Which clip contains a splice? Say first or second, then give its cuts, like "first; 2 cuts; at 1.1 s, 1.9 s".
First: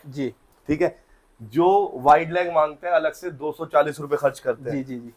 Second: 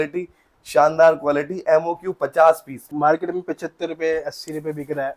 second; 1 cut; at 2.9 s